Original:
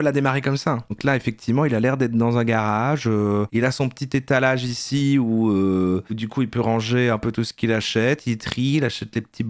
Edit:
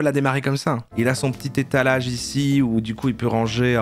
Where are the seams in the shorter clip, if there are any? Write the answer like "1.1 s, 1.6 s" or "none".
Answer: 0.9 s, 2.8 s